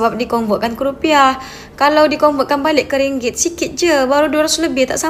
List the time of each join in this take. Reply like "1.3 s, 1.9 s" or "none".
none